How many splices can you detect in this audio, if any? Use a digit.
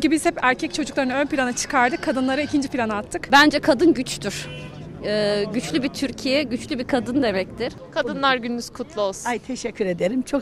2